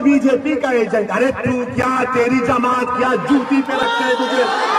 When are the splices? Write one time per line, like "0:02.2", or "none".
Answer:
none

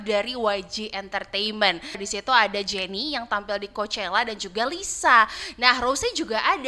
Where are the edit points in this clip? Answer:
0:02.0

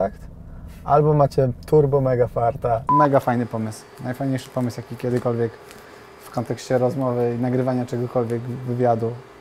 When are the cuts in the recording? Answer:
0:02.9

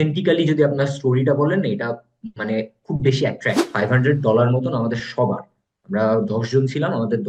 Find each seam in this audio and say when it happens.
0:03.6

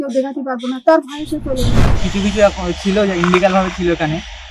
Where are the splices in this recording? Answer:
0:01.9

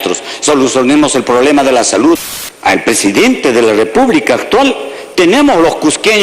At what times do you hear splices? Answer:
0:02.4

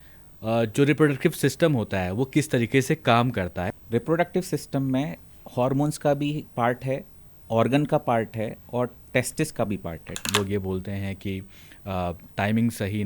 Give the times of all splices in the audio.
0:03.7
0:10.2

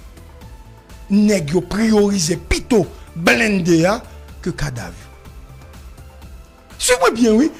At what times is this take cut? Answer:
none

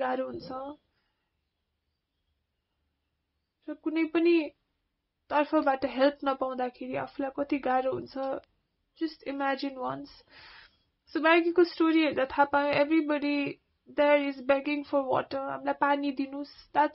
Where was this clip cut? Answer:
none

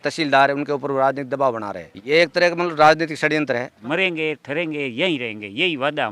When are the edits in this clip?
0:01.9
0:03.8

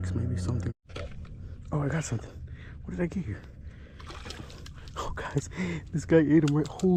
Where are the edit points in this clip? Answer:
none

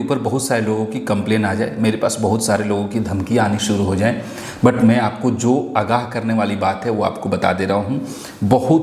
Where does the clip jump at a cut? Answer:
none

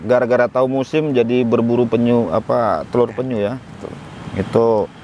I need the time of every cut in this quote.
none

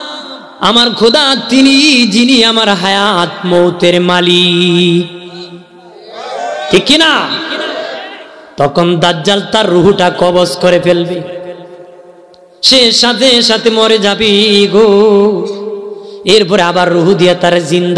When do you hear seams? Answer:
none

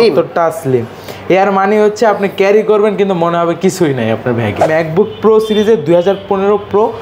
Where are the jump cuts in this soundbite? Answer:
0:04.6

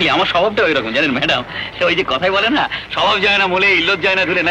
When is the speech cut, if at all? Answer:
none

